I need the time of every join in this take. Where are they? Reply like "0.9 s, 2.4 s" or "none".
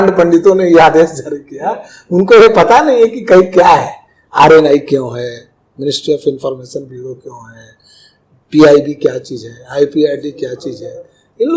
none